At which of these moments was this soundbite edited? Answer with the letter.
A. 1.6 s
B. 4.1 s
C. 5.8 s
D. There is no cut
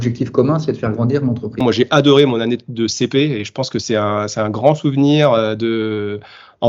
A